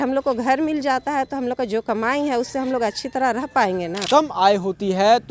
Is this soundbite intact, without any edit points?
no; 1 cut; at 3.9 s

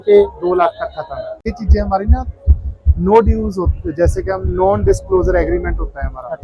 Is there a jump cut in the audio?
yes; 1 cut; at 1.5 s

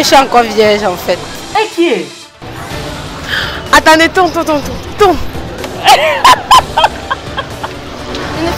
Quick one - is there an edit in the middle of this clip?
no; 0 cuts

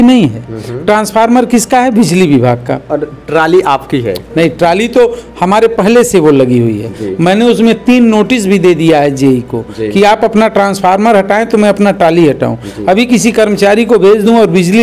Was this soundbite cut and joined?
no; 0 cuts

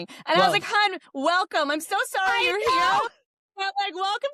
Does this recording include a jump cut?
no; 0 cuts

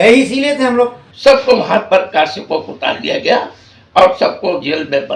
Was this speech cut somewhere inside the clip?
yes; 1 cut; at 1.0 s

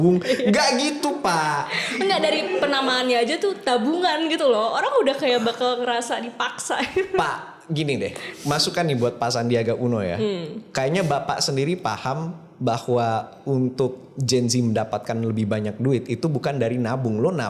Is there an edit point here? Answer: no; 0 cuts

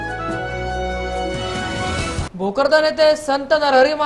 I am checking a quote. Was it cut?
yes; 1 cut; at 2.2 s

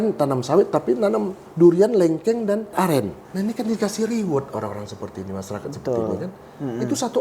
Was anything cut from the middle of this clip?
yes; 1 cut; at 2.9 s

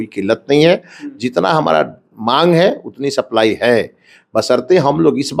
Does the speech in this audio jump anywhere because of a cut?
no; 0 cuts

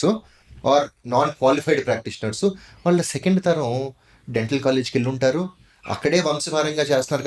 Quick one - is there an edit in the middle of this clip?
no; 0 cuts

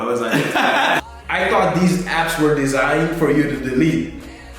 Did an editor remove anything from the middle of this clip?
yes; 1 cut; at 1.0 s

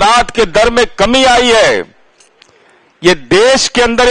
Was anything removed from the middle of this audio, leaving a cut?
no; 0 cuts

